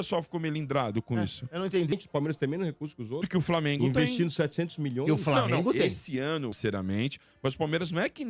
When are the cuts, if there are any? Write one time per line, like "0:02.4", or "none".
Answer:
0:01.9
0:06.6